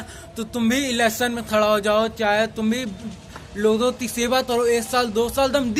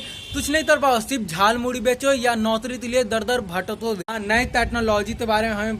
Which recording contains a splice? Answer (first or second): second